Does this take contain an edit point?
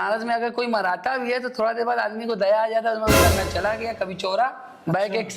yes; 1 cut; at 3.2 s

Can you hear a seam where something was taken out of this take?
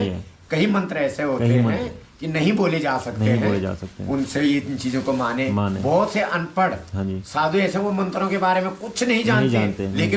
no; 0 cuts

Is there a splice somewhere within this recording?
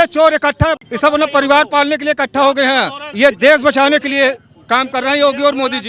yes; 2 cuts; at 0.8 s, 3.0 s

